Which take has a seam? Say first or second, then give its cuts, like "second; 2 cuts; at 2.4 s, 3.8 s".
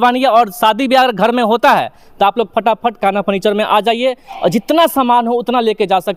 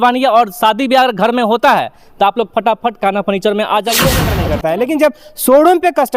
second; 1 cut; at 4.3 s